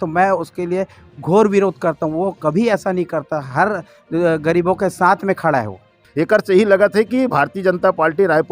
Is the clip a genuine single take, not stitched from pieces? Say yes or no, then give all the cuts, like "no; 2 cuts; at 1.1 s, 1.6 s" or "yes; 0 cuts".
no; 1 cut; at 6.0 s